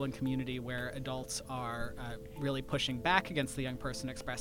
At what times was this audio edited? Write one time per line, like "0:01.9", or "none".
none